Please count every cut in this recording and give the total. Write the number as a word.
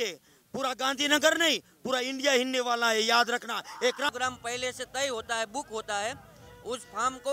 one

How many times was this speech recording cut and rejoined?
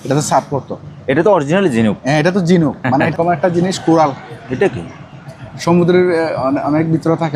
one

